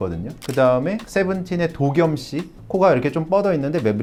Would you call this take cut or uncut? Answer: uncut